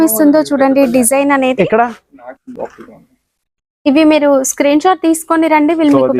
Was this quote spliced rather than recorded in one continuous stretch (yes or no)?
no